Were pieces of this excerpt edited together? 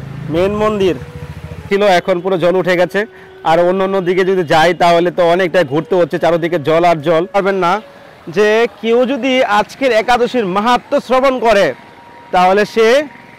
yes; 2 cuts; at 1.7 s, 7.4 s

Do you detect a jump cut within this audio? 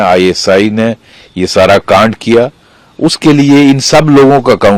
no; 0 cuts

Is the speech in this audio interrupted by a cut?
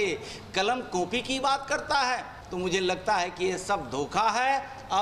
yes; 1 cut; at 2.4 s

